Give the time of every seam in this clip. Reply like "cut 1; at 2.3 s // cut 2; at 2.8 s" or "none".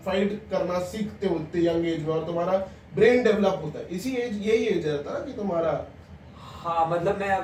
none